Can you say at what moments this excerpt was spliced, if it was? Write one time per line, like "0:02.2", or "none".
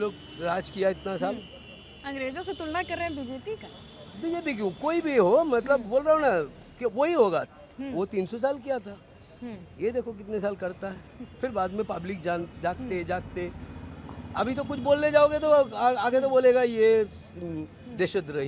none